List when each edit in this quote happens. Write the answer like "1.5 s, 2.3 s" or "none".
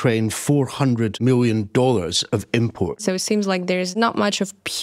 1.1 s, 3.0 s, 3.9 s